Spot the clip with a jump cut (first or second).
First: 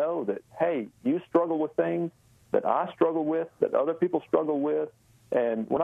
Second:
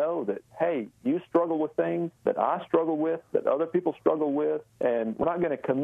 second